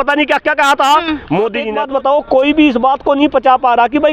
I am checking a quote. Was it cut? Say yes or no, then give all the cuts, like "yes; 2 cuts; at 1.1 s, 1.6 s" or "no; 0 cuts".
yes; 1 cut; at 1.7 s